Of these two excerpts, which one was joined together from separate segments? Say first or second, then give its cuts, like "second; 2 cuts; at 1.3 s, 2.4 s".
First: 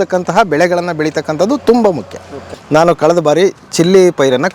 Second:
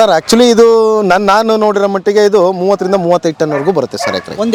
first; 1 cut; at 2.5 s